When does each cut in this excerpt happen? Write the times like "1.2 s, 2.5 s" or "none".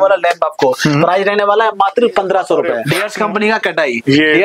2.9 s

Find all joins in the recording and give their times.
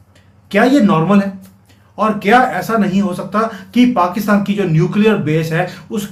none

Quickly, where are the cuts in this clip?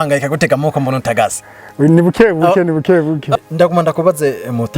3.3 s

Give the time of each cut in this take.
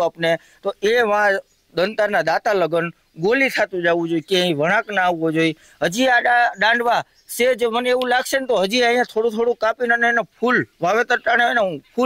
none

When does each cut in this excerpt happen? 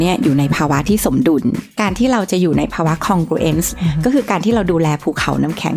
1.7 s, 3.7 s

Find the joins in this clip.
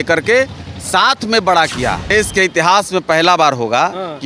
2.1 s

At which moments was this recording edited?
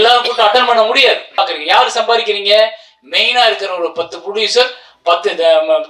1.4 s

